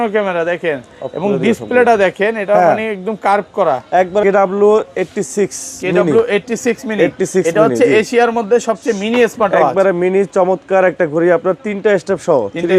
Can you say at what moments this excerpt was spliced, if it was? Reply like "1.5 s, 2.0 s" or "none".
4.2 s